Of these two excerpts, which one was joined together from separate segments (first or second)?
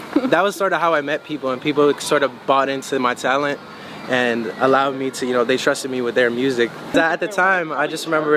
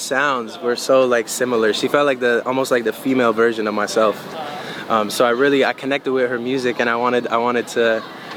first